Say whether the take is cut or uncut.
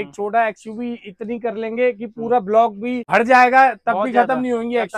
cut